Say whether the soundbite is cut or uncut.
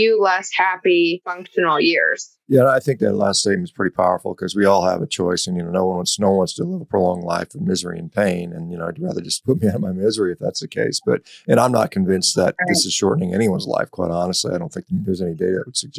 cut